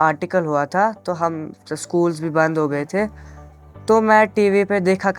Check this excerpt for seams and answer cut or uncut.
uncut